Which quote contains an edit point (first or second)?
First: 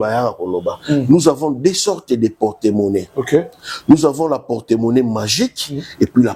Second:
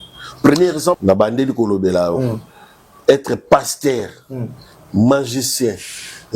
second